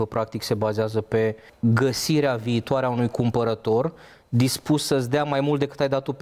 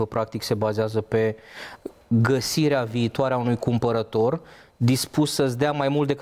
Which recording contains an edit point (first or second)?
first